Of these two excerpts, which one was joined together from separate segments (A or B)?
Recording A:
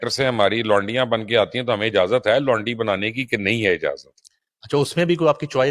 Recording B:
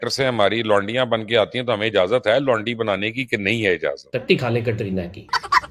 B